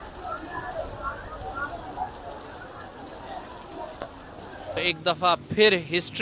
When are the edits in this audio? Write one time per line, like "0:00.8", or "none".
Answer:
0:04.9